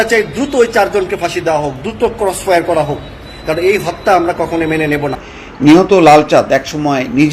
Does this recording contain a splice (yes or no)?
yes